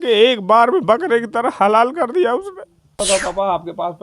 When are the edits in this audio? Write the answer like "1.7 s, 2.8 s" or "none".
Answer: 2.9 s